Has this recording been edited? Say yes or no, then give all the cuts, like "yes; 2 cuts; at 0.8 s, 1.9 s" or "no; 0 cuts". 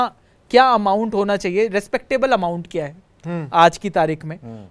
no; 0 cuts